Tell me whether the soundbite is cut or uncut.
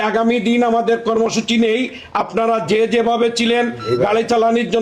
uncut